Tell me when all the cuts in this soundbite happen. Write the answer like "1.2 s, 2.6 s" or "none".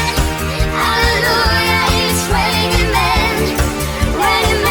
none